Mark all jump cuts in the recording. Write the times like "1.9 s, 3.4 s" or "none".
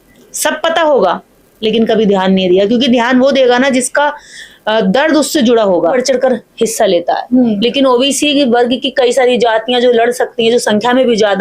5.9 s